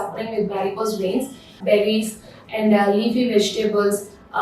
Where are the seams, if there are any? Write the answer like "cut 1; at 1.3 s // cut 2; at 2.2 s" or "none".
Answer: cut 1; at 1.6 s